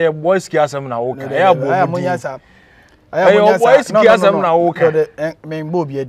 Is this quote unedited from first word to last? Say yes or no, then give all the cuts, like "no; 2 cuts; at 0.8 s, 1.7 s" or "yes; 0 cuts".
yes; 0 cuts